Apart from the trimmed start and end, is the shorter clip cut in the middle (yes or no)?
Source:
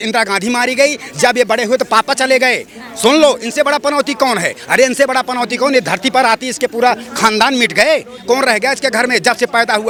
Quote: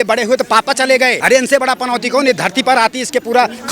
yes